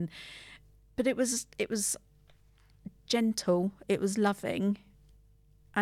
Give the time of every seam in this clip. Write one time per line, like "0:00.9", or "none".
0:00.9